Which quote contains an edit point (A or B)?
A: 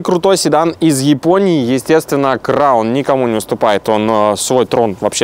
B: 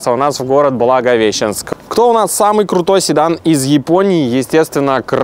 B